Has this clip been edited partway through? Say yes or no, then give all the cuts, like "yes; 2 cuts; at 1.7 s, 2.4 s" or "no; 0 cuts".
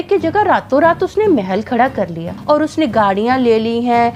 yes; 1 cut; at 2.3 s